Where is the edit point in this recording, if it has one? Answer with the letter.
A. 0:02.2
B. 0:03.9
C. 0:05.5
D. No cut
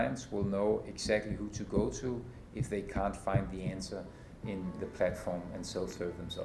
D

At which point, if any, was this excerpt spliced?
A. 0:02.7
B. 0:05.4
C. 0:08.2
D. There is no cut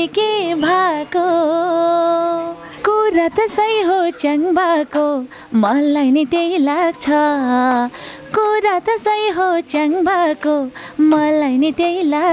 A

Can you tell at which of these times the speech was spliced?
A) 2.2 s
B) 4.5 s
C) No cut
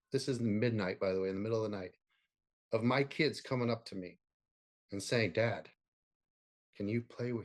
C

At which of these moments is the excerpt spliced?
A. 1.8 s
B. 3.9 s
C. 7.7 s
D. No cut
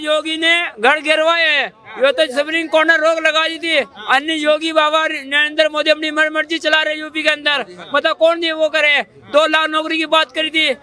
D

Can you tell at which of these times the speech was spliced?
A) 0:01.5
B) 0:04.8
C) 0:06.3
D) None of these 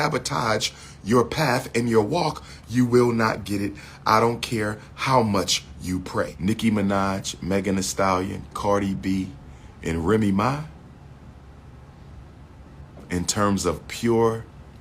C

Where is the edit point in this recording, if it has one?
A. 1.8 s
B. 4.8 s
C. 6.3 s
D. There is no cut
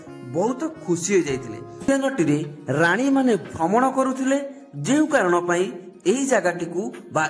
A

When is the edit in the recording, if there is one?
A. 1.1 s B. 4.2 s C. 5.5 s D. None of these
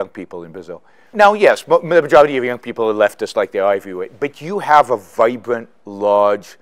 A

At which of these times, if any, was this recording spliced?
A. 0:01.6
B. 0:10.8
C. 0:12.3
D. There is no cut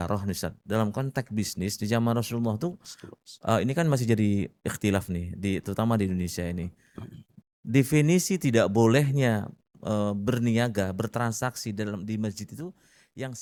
D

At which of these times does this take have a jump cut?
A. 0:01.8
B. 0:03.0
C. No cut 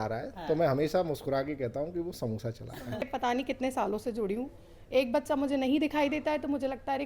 B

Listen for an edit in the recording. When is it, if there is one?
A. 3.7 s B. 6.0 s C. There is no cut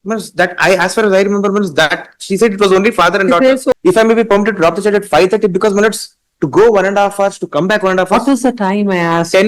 A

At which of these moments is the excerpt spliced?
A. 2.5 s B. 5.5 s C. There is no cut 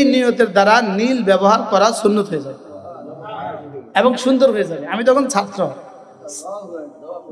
C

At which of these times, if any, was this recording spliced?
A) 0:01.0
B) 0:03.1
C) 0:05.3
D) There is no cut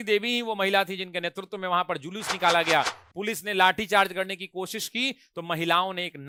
D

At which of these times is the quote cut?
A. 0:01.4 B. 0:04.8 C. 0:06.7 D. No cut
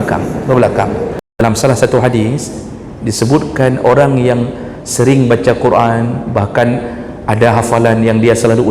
A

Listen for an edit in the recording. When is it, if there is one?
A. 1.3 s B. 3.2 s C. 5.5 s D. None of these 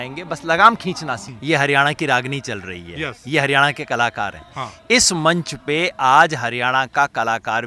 A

